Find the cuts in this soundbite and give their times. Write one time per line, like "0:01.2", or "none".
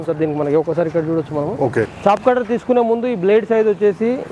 0:01.9